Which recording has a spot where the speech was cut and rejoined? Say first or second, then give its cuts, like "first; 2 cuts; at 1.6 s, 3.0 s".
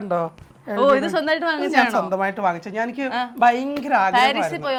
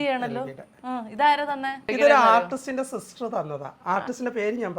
second; 1 cut; at 1.9 s